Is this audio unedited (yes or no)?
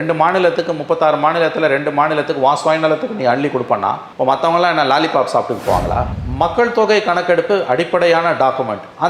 no